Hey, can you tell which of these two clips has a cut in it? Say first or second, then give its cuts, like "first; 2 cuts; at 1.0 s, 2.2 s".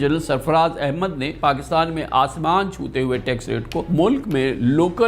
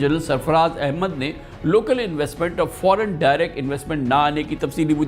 first; 2 cuts; at 1.3 s, 3.9 s